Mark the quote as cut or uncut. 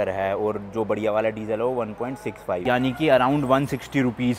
uncut